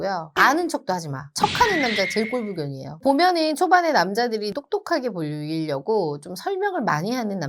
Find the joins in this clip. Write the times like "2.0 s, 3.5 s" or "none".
2.8 s, 4.5 s